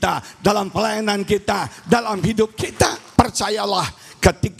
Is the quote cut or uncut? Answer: cut